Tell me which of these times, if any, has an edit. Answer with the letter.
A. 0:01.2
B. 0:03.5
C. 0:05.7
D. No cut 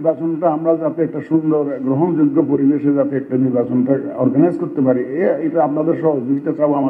D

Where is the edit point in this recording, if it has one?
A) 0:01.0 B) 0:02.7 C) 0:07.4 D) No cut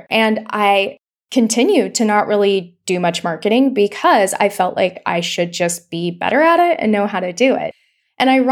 D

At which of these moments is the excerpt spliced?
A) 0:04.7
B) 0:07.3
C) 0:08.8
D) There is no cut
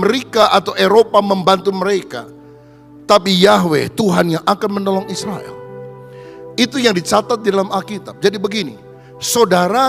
D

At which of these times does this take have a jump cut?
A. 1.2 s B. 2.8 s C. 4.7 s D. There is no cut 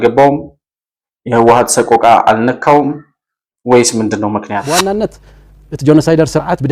C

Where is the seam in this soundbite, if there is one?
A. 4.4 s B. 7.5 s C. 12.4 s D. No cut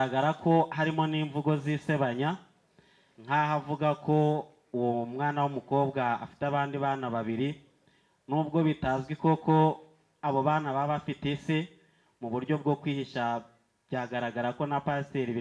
D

